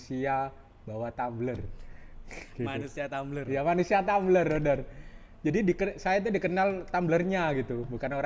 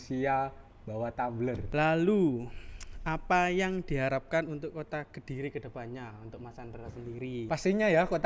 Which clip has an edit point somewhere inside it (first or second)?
second